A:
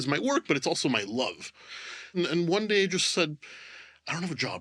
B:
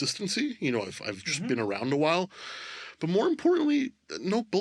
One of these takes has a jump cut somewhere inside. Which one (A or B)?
A